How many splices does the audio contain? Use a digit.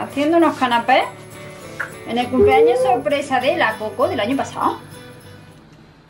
0